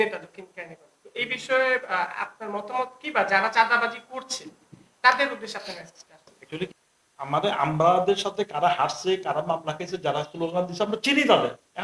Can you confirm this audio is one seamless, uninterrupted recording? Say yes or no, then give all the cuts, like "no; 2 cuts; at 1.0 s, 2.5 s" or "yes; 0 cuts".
no; 1 cut; at 6.7 s